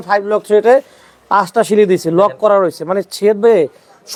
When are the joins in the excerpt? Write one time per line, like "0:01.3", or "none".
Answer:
none